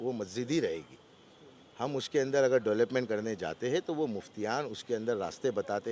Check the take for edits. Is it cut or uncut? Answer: uncut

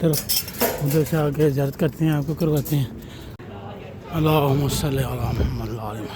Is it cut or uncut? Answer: cut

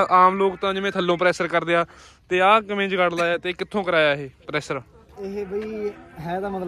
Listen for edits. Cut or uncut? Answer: uncut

